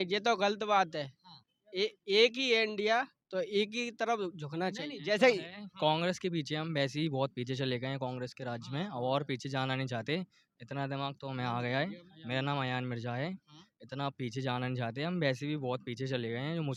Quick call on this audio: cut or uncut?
uncut